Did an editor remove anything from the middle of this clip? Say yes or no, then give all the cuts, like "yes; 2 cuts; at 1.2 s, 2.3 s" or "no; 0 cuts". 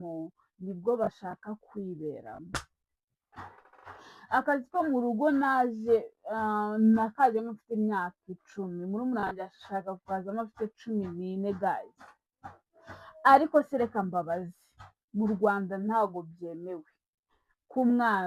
no; 0 cuts